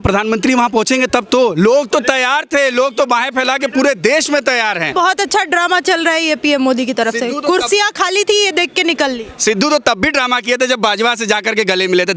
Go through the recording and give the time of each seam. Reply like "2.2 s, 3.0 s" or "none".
4.9 s

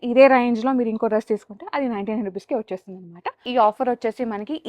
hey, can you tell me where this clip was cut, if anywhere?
3.4 s

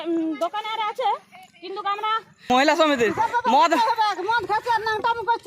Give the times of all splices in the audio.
2.3 s

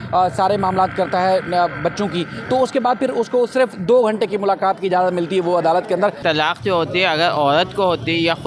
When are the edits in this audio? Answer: 6.2 s

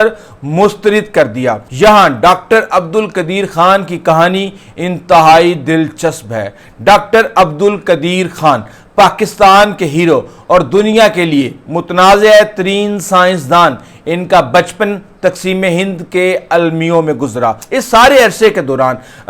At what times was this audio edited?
1.6 s, 17.7 s

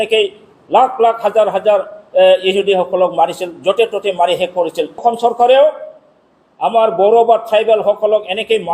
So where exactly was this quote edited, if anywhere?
5.0 s

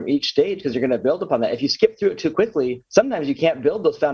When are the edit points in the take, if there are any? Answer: 2.8 s

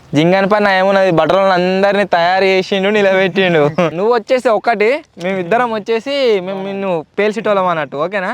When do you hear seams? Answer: 3.9 s

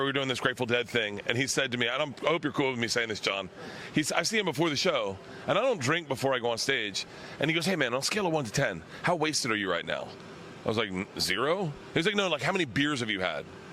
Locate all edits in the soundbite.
none

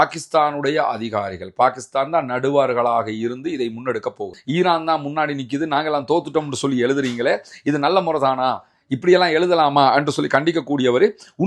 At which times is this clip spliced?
4.3 s

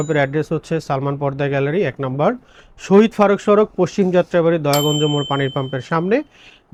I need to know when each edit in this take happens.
none

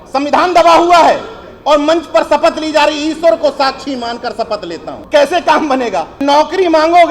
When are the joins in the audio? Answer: 5.0 s, 6.2 s

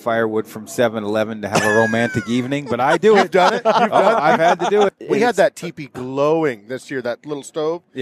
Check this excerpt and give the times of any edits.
5.0 s

